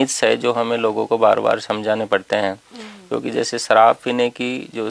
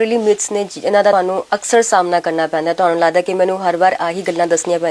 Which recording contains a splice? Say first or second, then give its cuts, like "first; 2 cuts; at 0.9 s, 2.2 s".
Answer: second; 1 cut; at 1.1 s